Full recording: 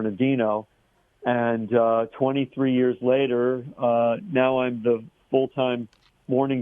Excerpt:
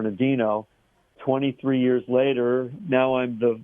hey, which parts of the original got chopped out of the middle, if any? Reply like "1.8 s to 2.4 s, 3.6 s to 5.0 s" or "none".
1.2 s to 2.1 s, 3.7 s to 4.2 s

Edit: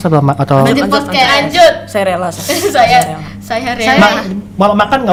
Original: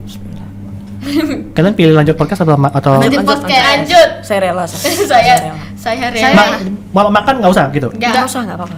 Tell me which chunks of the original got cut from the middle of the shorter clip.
none

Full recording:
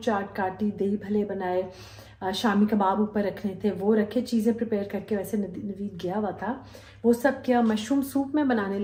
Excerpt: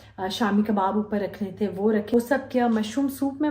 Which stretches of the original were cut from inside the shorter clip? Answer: 4.1 s to 7.0 s

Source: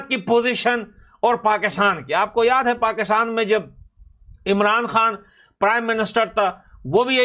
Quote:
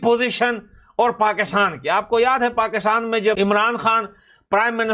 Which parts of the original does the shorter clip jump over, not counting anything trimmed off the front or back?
3.6 s to 4.5 s

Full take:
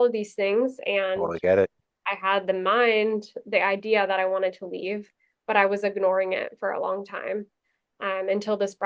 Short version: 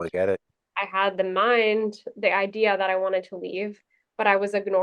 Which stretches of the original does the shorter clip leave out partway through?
none

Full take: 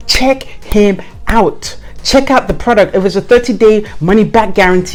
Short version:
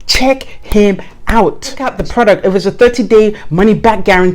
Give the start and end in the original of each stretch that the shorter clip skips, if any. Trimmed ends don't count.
1.9 s to 2.4 s

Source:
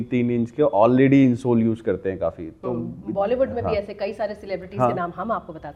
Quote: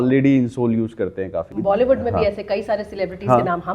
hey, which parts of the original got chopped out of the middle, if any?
2.4 s to 3.0 s

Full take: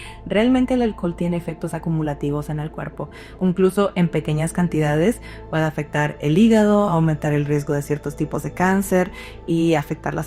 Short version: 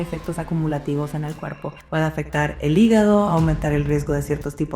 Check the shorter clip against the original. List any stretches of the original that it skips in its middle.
3.1 s to 5.3 s

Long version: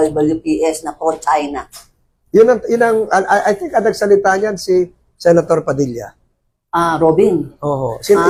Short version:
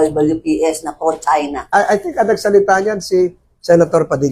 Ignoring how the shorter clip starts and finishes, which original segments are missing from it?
1.7 s to 3.3 s

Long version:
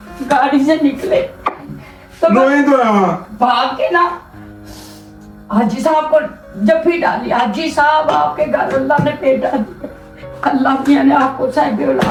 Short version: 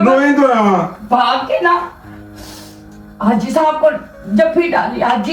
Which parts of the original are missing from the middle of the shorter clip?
none

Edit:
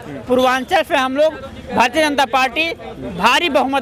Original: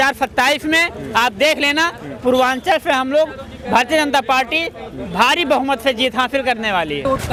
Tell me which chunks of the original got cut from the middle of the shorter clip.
none

